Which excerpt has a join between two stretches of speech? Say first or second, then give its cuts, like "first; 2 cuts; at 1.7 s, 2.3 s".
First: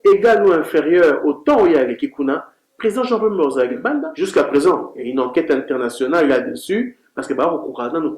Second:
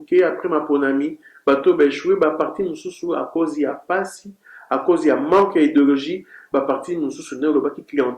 first; 1 cut; at 4.1 s